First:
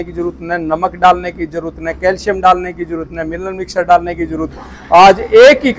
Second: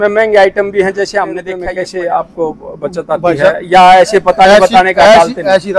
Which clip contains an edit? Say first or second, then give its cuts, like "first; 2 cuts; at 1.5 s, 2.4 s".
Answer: second; 1 cut; at 1.5 s